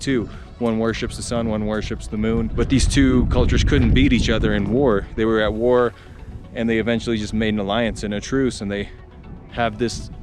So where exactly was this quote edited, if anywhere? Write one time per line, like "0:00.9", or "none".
0:02.5

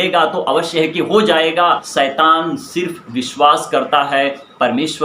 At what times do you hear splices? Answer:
0:01.8

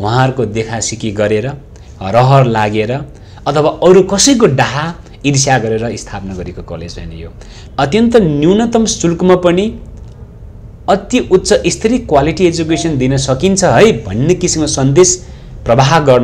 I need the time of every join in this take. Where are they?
0:07.6

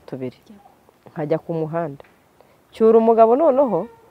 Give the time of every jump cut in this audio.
none

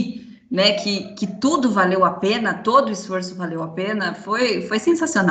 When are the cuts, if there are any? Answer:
none

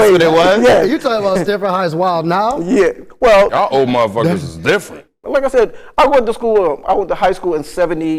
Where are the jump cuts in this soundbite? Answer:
0:03.5
0:05.0

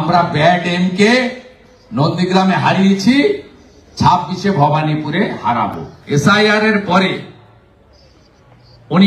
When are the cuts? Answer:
0:05.9

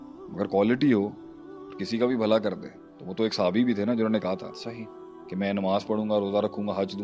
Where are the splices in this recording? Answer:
none

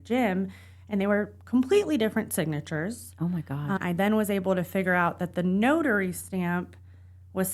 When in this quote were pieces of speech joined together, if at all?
0:03.8

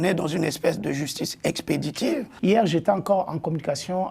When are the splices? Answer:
0:02.3

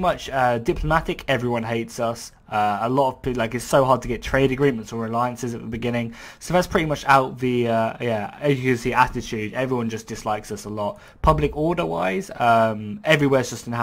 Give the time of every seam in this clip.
0:04.8

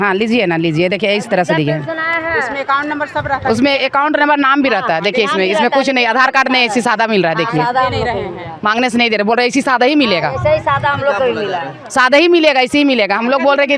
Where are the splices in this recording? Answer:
none

